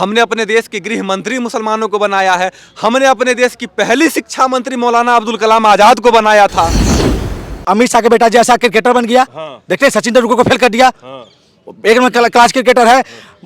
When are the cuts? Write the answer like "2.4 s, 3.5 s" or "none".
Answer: 7.0 s